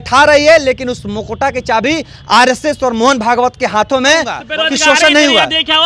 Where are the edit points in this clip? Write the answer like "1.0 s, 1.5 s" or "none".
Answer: 4.5 s